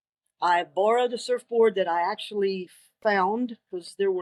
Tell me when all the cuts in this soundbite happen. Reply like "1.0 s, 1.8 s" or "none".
none